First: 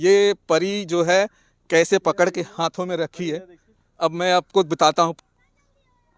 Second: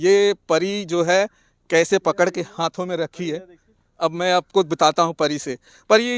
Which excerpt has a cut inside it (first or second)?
first